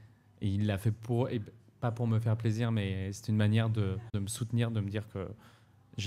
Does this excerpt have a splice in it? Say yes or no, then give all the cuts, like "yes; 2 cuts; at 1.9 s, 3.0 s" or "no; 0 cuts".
yes; 1 cut; at 4.1 s